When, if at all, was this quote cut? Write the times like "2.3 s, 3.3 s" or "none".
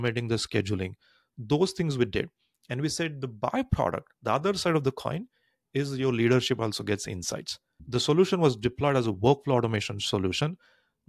7.8 s